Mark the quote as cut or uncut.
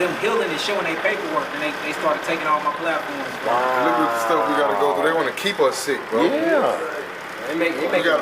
uncut